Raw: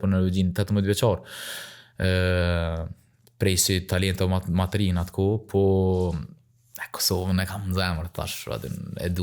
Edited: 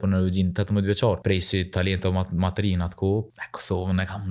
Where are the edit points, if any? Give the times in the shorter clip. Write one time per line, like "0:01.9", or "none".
0:01.2
0:03.3